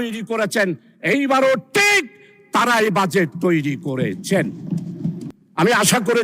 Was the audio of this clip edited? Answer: yes; 1 cut; at 5.2 s

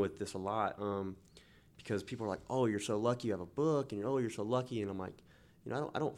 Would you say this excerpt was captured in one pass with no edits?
yes; 0 cuts

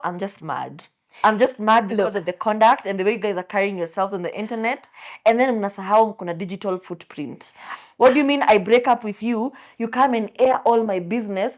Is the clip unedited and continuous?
yes; 0 cuts

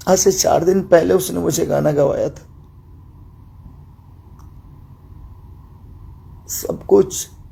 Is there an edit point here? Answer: no; 0 cuts

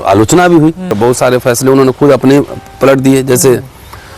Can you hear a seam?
yes; 1 cut; at 0.9 s

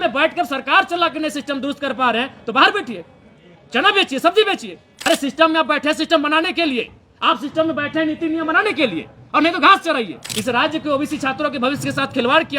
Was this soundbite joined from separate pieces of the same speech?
yes; 2 cuts; at 4.9 s, 10.2 s

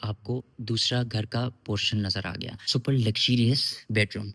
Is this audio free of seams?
no; 1 cut; at 2.7 s

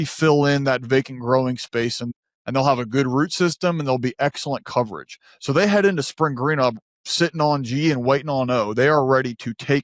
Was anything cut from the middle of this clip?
yes; 1 cut; at 2.0 s

